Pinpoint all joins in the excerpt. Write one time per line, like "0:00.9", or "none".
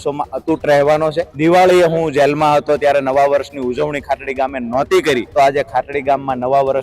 0:01.3
0:05.3